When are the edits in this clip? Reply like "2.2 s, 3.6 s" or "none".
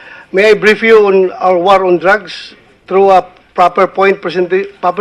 1.6 s